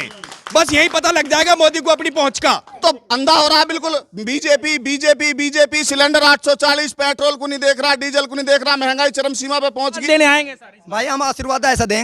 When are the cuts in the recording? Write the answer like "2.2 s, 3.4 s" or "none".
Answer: 2.7 s, 10.0 s